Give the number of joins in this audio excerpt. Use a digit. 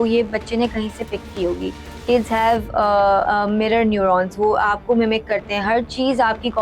1